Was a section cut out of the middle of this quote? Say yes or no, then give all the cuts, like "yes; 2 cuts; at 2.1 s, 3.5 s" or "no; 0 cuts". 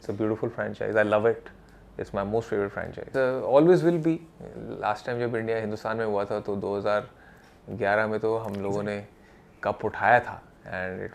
yes; 1 cut; at 3.0 s